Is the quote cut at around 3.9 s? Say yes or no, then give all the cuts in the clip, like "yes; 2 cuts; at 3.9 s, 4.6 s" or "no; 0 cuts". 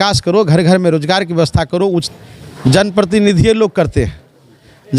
no; 1 cut; at 2.1 s